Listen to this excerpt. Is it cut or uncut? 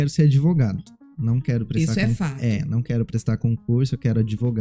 uncut